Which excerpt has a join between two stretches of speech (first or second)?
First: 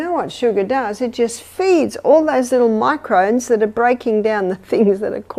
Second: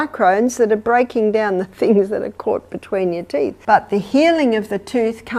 second